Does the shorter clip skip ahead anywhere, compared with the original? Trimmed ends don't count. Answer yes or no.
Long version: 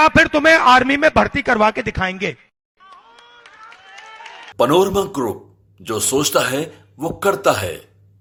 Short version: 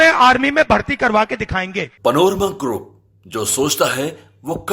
yes